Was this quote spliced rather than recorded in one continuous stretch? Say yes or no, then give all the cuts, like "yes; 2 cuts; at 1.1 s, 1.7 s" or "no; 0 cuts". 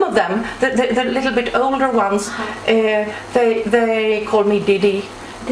no; 0 cuts